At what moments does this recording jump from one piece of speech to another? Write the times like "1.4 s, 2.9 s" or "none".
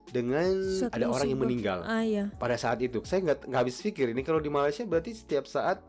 3.1 s